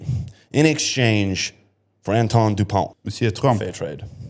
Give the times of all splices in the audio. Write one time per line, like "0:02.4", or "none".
0:03.0